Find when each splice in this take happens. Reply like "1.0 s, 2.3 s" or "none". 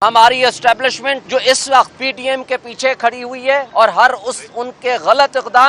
1.2 s, 2.0 s, 3.7 s